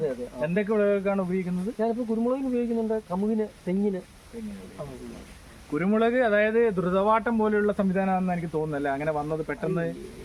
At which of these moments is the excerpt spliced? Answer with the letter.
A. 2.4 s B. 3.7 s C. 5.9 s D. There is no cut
D